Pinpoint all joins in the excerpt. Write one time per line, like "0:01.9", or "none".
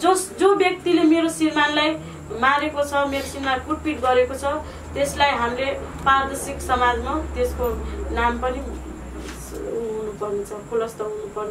none